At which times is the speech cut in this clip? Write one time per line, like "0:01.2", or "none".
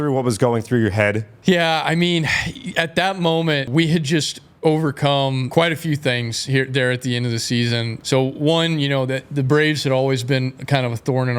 0:03.7
0:05.5
0:07.9